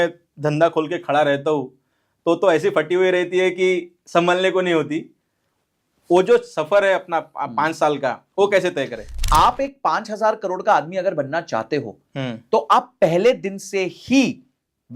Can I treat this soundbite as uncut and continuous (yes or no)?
no